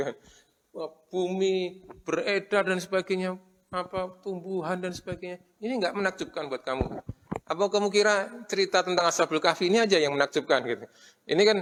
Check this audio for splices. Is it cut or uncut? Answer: uncut